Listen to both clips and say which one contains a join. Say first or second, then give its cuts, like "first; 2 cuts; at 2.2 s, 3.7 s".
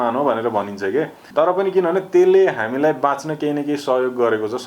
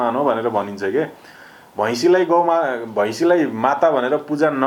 first; 1 cut; at 1.2 s